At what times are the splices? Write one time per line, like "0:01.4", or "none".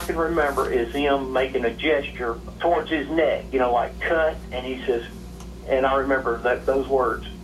0:02.5
0:04.6